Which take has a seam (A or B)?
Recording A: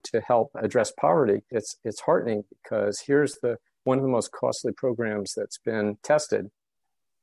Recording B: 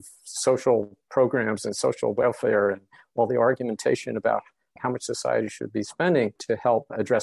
B